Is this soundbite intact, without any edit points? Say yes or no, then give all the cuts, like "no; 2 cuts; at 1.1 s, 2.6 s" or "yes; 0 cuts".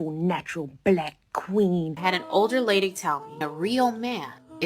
no; 1 cut; at 1.9 s